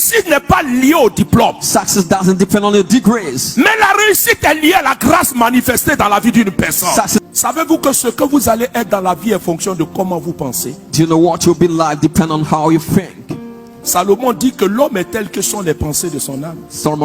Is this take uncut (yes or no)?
no